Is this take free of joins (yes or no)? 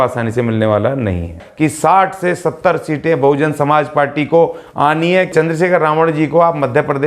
no